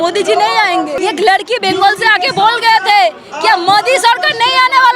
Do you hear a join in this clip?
yes; 1 cut; at 1.0 s

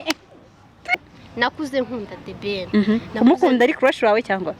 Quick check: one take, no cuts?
no; 1 cut; at 0.9 s

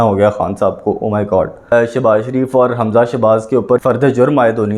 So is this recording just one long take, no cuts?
no; 2 cuts; at 1.7 s, 3.8 s

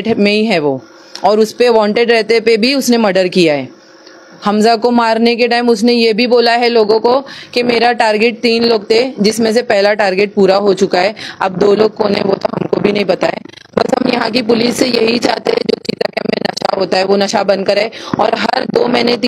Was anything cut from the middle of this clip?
no; 0 cuts

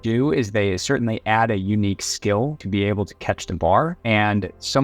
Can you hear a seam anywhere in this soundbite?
yes; 1 cut; at 2.6 s

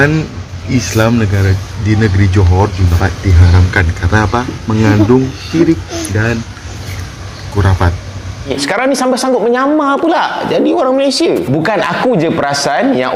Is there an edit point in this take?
yes; 2 cuts; at 2.9 s, 8.5 s

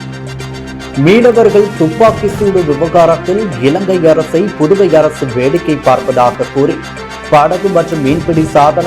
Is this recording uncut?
no; 1 cut; at 1.0 s

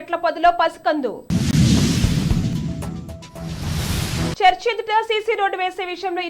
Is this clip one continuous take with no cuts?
no; 3 cuts; at 1.5 s, 2.5 s, 4.4 s

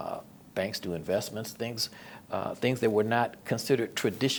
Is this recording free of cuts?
yes; 0 cuts

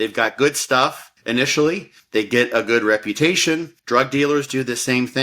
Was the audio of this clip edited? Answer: yes; 3 cuts; at 1.1 s, 1.9 s, 3.7 s

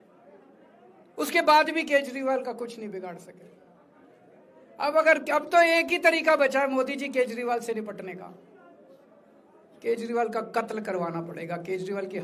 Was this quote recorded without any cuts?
yes; 0 cuts

